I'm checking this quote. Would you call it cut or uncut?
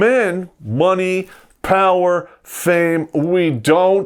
uncut